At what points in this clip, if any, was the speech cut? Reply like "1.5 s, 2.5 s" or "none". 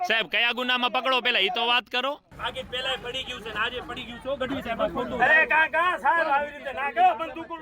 2.3 s